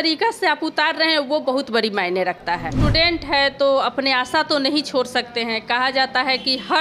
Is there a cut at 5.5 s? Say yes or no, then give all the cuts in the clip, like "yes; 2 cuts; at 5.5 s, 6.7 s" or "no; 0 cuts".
no; 1 cut; at 2.8 s